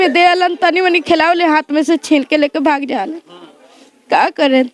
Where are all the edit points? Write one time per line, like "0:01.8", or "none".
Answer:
none